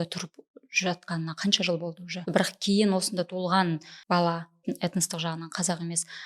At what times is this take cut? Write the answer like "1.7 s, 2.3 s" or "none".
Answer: 2.2 s, 3.9 s, 4.6 s